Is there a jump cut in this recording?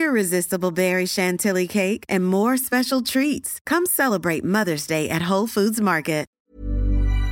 yes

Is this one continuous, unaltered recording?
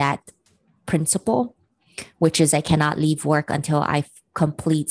yes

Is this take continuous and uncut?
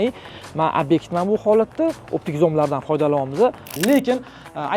no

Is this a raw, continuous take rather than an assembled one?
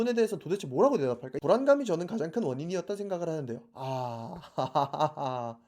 no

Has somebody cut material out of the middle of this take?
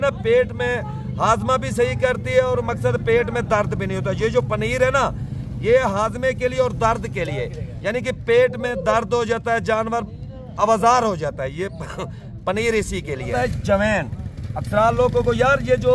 yes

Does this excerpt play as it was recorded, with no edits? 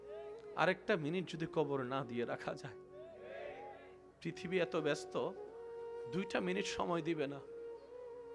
no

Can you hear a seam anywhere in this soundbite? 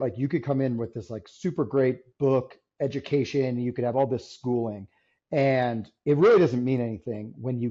no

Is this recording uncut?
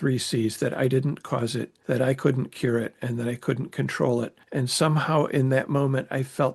no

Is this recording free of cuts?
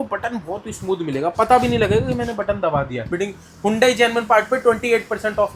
no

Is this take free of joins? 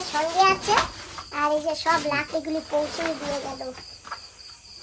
yes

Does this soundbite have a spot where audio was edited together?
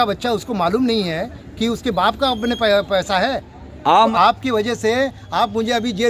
yes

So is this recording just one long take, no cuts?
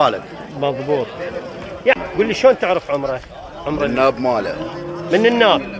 no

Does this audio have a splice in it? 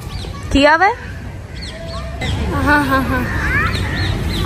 yes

